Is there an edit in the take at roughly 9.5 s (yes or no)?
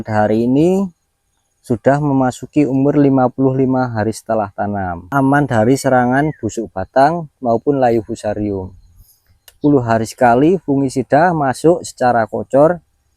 yes